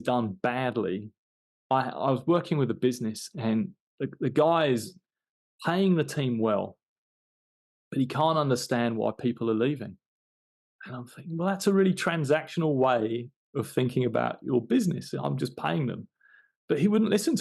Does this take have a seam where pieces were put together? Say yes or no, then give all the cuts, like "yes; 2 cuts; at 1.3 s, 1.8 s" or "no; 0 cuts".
no; 0 cuts